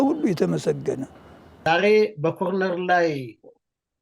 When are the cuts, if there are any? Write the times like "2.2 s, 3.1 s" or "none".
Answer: 1.7 s